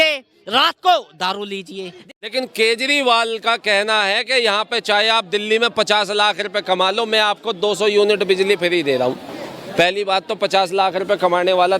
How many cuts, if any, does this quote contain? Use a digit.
1